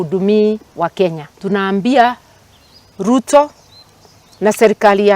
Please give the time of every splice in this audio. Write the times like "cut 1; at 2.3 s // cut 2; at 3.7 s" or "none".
cut 1; at 1.3 s